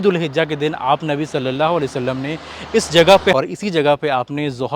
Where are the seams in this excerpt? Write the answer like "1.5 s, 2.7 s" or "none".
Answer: 3.3 s